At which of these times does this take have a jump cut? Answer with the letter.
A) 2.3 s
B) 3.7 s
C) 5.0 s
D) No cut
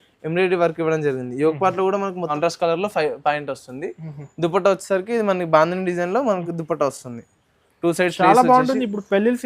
A